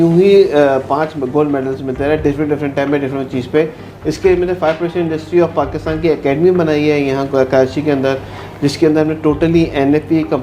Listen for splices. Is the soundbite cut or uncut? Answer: cut